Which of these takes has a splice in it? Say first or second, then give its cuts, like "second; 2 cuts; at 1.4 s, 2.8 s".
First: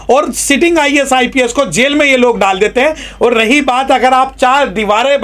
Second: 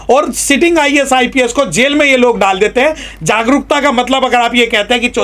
second; 1 cut; at 3.1 s